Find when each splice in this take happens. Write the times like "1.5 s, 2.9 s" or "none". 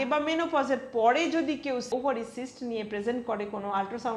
1.9 s